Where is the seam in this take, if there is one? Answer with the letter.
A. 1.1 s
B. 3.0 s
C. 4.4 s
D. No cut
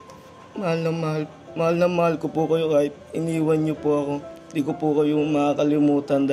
C